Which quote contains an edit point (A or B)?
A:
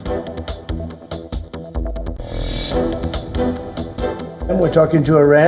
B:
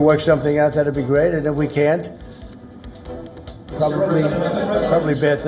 A